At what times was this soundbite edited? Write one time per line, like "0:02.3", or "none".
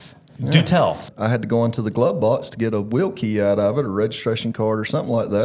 0:01.1